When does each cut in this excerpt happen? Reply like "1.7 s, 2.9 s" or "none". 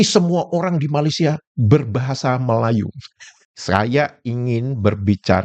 3.5 s